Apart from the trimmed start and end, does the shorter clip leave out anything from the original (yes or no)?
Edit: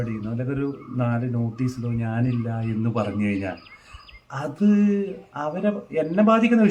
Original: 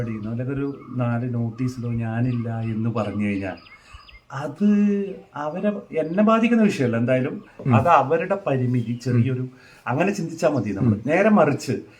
no